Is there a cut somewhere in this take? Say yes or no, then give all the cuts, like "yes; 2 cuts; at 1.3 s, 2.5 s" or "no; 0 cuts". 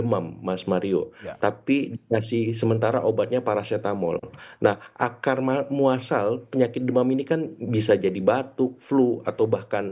no; 0 cuts